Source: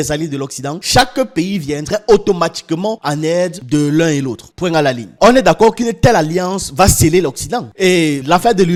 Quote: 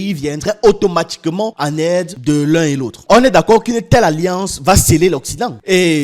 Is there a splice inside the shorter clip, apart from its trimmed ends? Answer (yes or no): yes